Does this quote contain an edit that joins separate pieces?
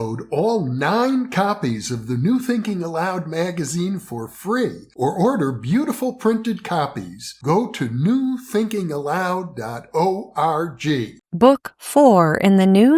no; 0 cuts

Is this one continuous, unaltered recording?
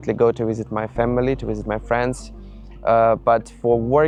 yes; 0 cuts

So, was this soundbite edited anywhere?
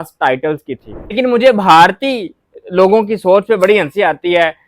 yes; 1 cut; at 1.1 s

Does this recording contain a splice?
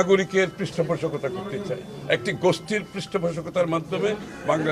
no; 0 cuts

